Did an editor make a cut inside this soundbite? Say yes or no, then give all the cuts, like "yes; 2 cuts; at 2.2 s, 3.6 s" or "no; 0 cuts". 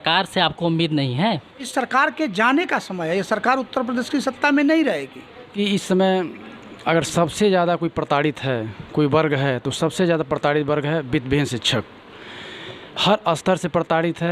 yes; 2 cuts; at 1.7 s, 5.5 s